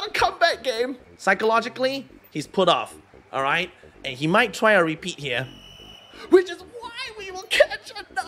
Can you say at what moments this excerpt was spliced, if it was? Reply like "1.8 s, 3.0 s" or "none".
1.1 s